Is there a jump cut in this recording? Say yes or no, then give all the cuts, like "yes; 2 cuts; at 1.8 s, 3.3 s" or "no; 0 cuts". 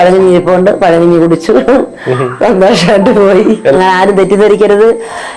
yes; 1 cut; at 3.7 s